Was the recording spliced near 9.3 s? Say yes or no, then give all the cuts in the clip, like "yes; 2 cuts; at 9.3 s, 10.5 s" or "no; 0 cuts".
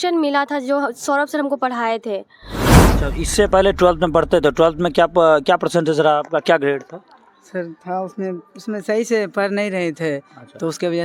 no; 1 cut; at 2.8 s